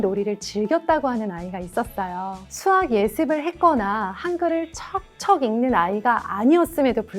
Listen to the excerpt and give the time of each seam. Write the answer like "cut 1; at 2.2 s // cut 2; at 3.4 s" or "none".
cut 1; at 2.4 s